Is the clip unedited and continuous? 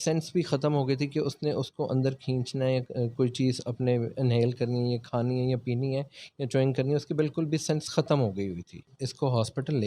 no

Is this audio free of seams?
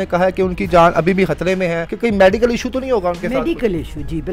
no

